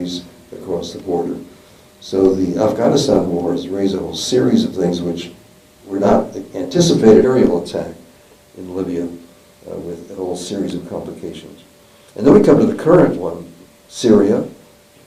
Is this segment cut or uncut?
uncut